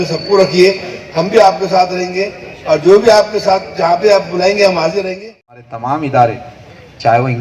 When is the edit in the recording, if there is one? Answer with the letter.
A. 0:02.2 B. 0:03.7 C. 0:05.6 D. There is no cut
C